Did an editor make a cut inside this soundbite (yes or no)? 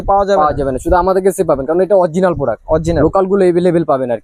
no